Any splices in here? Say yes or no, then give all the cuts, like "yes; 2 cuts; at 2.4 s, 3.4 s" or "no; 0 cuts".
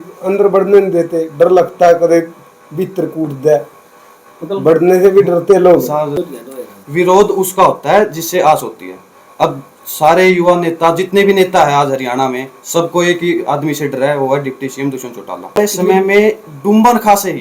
yes; 2 cuts; at 6.1 s, 15.6 s